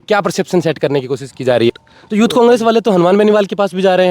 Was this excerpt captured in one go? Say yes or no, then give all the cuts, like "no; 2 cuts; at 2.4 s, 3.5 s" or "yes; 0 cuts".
no; 1 cut; at 1.7 s